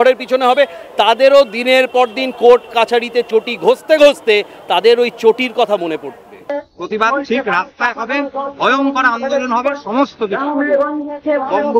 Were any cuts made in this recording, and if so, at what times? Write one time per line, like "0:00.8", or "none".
0:06.4